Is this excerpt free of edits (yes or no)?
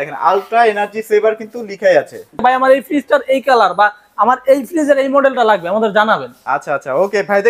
no